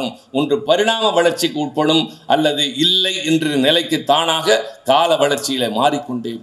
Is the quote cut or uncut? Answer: uncut